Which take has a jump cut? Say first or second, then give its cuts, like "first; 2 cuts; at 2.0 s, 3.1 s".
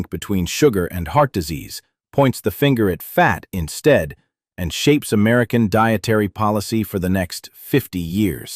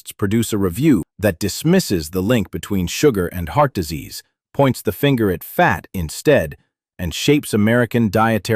second; 1 cut; at 1.1 s